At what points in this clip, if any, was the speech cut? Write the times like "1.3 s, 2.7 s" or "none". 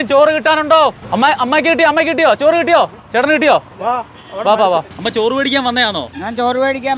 1.0 s, 4.9 s